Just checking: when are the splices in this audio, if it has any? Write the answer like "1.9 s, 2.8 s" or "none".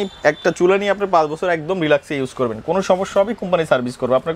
none